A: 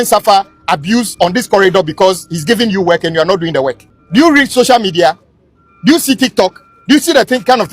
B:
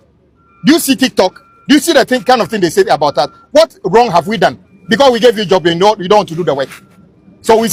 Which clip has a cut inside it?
A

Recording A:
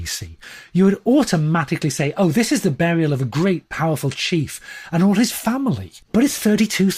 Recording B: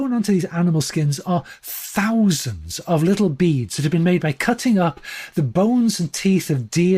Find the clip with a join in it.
A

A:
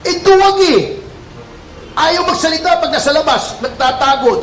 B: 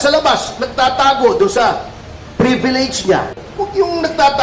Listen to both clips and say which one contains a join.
B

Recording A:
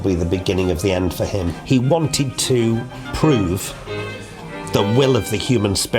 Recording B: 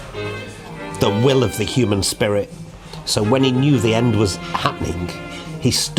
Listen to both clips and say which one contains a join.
A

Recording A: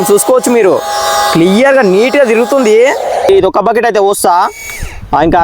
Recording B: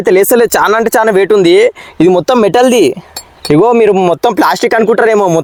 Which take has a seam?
A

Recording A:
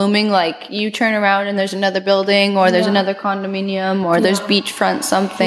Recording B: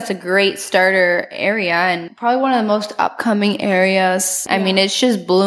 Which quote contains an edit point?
B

